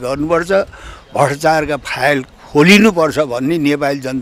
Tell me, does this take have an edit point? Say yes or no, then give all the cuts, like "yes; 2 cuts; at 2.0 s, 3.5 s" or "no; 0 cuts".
no; 0 cuts